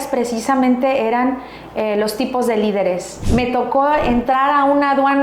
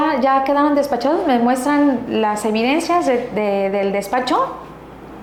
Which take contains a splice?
first; 1 cut; at 3.1 s

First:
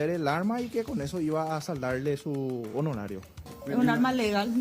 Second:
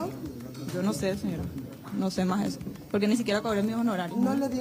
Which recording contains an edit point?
first; 1 cut; at 3.4 s

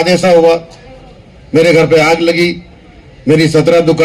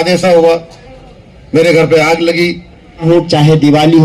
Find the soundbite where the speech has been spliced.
second; 1 cut; at 3.0 s

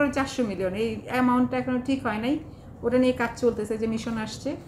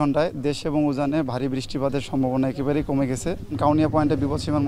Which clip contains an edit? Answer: second; 1 cut; at 3.6 s

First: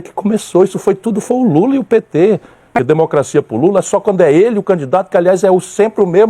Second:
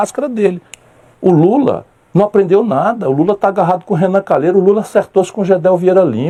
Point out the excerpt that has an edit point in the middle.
first; 1 cut; at 2.6 s

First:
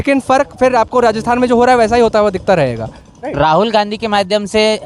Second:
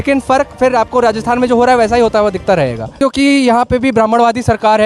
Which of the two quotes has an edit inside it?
second; 1 cut; at 3.0 s

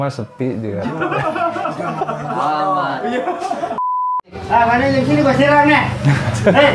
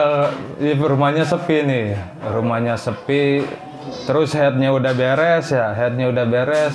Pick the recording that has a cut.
first; 1 cut; at 3.9 s

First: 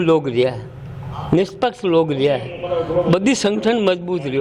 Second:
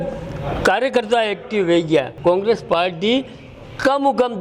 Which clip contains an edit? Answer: second; 1 cut; at 2.1 s

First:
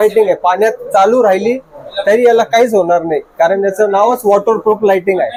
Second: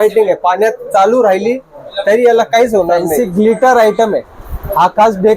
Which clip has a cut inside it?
second; 1 cut; at 3.1 s

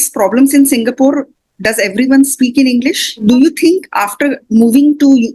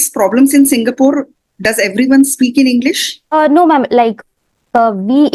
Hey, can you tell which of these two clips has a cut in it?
first; 1 cut; at 3.2 s

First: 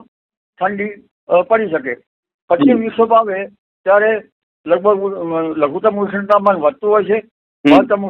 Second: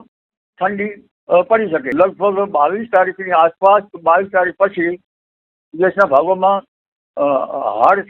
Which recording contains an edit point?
second; 1 cut; at 1.9 s

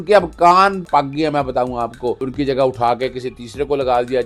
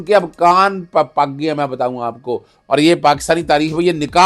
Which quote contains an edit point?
first; 2 cuts; at 0.9 s, 2.2 s

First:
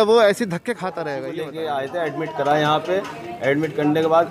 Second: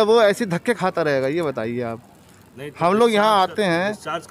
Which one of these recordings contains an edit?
first; 1 cut; at 1.2 s

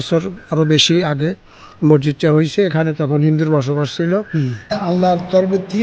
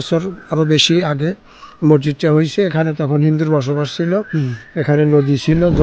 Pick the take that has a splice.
first; 1 cut; at 4.7 s

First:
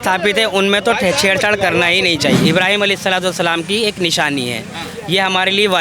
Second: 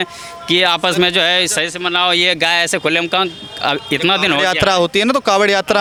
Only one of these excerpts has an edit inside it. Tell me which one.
first; 1 cut; at 2.4 s

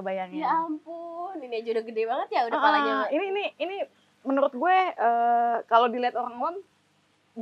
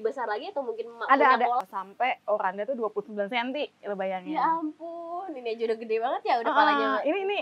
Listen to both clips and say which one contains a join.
second; 1 cut; at 1.6 s

